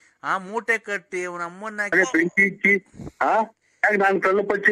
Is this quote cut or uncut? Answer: cut